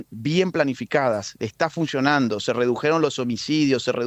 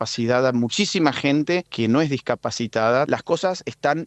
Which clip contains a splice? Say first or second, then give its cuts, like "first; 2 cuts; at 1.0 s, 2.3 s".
second; 2 cuts; at 1.7 s, 3.1 s